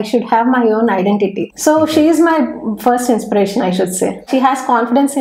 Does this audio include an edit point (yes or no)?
yes